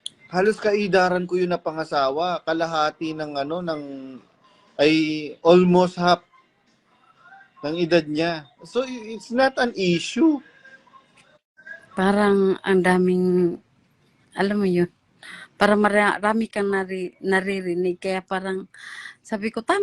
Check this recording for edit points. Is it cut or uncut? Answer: uncut